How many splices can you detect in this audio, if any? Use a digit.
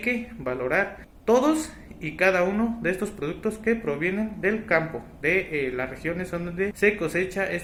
0